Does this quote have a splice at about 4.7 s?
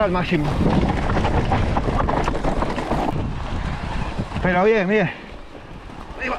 no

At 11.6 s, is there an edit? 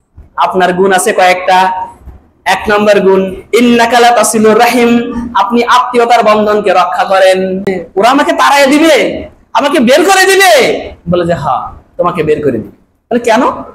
no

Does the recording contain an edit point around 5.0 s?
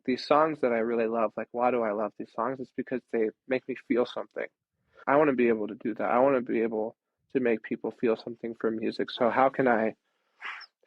yes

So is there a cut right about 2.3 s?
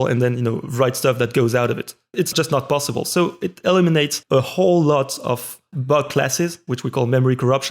yes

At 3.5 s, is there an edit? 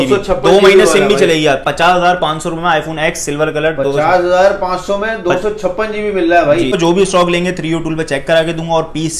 no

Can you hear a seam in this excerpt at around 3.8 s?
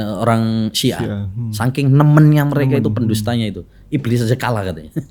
no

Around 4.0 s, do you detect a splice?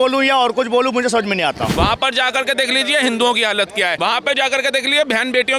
yes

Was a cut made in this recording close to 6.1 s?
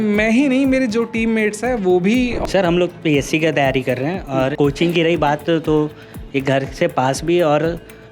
no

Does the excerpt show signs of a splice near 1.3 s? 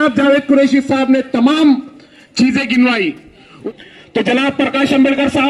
no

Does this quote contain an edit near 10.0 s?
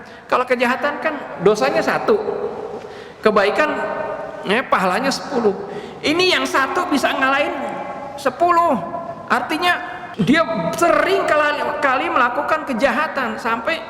yes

